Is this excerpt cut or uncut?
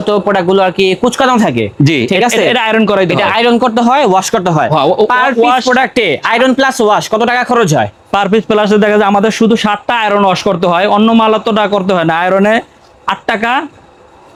uncut